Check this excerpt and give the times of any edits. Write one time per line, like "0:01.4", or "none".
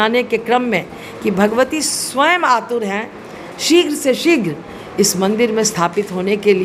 none